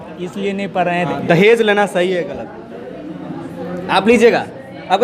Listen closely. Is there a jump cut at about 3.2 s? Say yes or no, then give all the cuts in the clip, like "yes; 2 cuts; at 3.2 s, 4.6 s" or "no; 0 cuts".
no; 1 cut; at 1.1 s